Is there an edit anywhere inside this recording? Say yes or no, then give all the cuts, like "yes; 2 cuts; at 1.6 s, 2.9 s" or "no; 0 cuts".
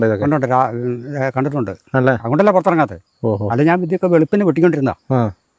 no; 0 cuts